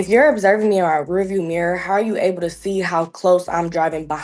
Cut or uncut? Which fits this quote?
uncut